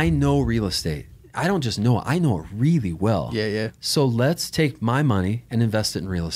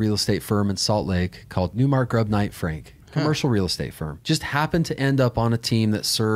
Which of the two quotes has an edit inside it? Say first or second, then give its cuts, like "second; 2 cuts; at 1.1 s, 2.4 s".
second; 2 cuts; at 1.7 s, 4.1 s